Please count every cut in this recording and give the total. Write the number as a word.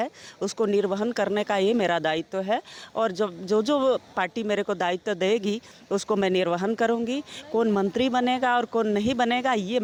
zero